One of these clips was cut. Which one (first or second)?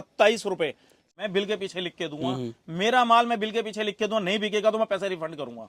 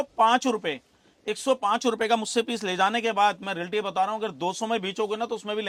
first